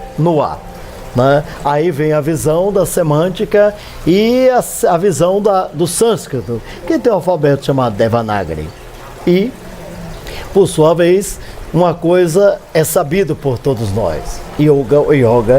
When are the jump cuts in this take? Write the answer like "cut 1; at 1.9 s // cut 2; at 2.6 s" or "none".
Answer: cut 1; at 9.4 s